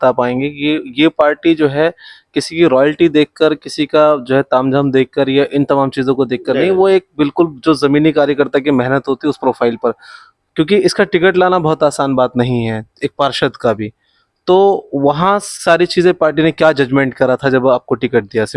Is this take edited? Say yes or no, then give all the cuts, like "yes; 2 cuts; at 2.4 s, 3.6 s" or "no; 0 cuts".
no; 0 cuts